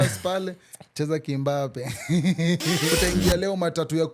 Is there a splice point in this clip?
yes; 1 cut; at 2.9 s

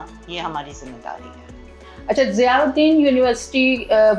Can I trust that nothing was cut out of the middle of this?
yes; 0 cuts

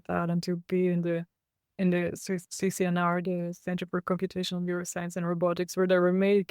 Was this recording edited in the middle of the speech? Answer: no; 0 cuts

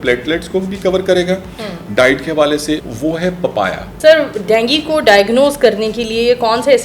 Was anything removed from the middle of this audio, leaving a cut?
yes; 2 cuts; at 2.8 s, 3.9 s

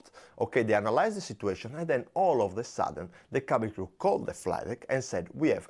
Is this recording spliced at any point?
no; 0 cuts

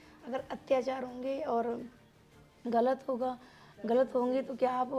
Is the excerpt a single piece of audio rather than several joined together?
yes; 0 cuts

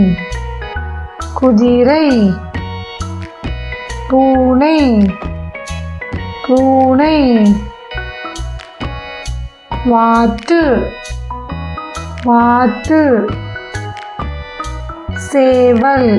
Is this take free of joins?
yes; 0 cuts

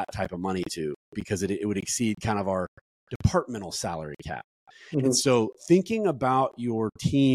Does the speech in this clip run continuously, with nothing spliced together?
yes; 0 cuts

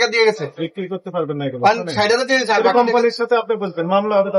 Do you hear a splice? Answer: no; 0 cuts

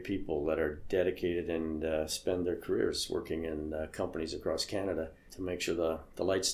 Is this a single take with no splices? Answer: no; 1 cut; at 5.3 s

